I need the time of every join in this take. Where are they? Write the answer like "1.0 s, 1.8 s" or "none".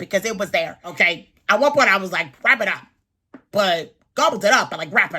0.9 s